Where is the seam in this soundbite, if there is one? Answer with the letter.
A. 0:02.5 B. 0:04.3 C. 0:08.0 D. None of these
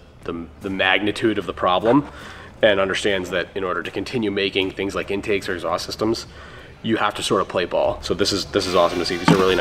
C